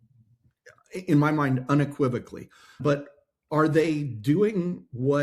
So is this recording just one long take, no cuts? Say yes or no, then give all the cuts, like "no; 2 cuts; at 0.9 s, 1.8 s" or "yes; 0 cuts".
no; 1 cut; at 2.8 s